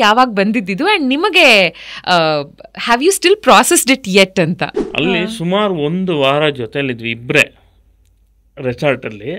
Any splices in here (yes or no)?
yes